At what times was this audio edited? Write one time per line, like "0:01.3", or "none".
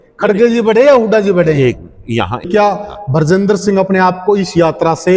0:02.5